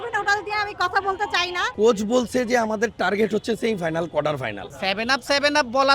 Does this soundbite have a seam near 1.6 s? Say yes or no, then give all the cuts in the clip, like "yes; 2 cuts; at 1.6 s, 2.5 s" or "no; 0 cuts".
yes; 2 cuts; at 1.6 s, 4.6 s